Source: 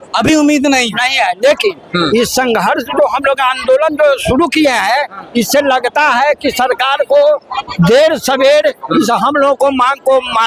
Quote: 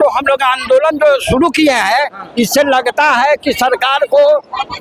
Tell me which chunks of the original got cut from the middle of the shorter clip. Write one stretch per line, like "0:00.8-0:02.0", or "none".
none

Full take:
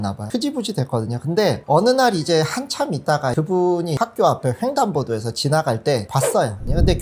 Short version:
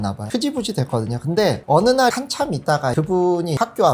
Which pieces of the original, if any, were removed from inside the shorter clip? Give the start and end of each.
0:02.1-0:02.5

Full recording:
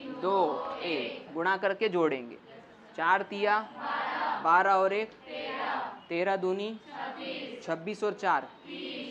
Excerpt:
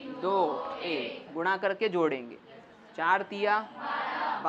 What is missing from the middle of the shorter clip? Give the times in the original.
none

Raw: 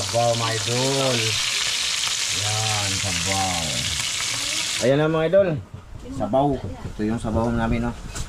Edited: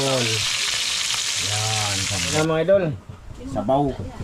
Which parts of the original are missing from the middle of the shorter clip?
0:03.3-0:05.0

